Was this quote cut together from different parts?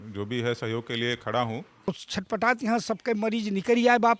yes; 1 cut; at 1.7 s

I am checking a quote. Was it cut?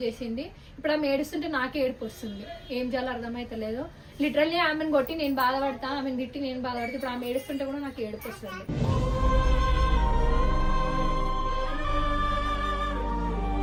no; 0 cuts

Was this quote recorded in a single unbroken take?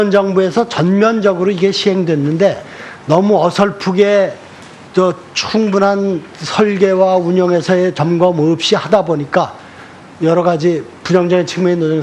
no; 1 cut; at 7.2 s

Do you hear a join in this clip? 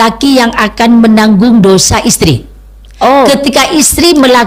no; 0 cuts

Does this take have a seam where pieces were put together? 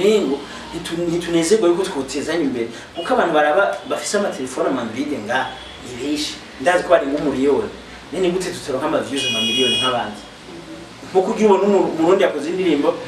no; 0 cuts

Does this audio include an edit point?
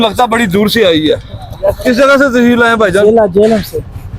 no; 0 cuts

